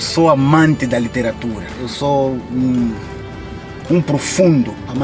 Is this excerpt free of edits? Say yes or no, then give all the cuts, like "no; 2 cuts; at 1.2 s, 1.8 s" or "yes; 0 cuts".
yes; 0 cuts